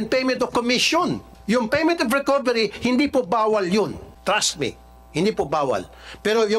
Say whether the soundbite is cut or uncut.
cut